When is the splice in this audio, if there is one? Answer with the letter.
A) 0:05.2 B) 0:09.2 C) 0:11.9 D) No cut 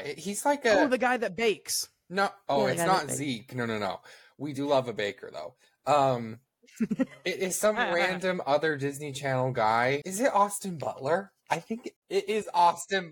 C